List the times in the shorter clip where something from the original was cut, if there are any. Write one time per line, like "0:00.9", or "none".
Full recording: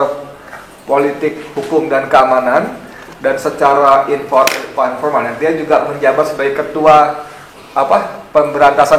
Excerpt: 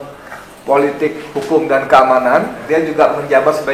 0:02.6